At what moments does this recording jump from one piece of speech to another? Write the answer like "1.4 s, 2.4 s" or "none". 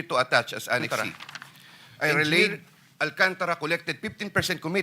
2.4 s